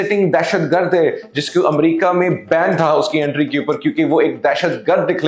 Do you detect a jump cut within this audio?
no; 0 cuts

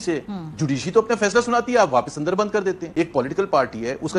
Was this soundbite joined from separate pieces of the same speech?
yes; 1 cut; at 2.8 s

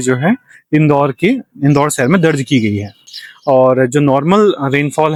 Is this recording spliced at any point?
no; 0 cuts

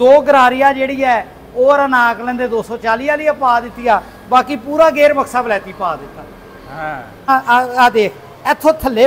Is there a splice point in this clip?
yes; 1 cut; at 7.3 s

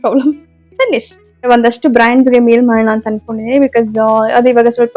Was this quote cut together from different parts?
yes; 1 cut; at 1.5 s

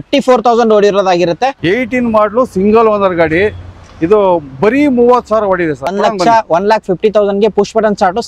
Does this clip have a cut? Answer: yes; 2 cuts; at 1.6 s, 5.9 s

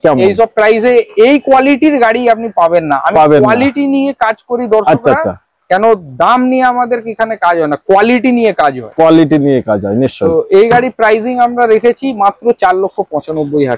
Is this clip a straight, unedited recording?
yes; 0 cuts

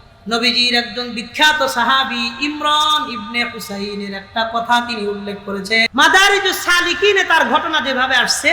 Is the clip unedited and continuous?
no; 1 cut; at 5.9 s

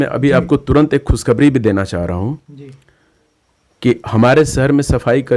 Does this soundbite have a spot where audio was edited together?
no; 0 cuts

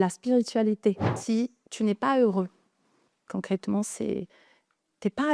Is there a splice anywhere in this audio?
yes; 1 cut; at 1.1 s

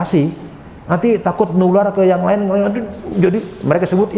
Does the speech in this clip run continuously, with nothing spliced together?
yes; 0 cuts

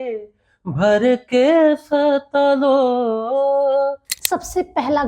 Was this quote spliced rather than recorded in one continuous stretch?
yes; 1 cut; at 4.1 s

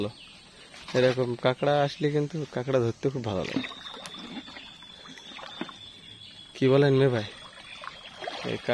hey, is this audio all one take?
yes; 0 cuts

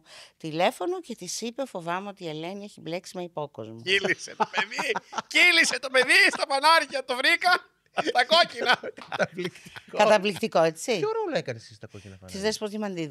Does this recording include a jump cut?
no; 0 cuts

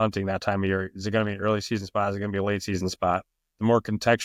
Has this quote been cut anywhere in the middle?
no; 0 cuts

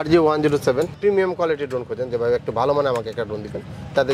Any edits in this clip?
yes; 1 cut; at 1.0 s

